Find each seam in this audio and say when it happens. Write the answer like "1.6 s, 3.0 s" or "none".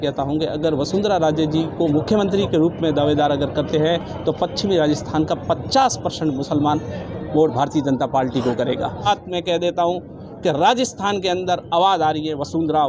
9.1 s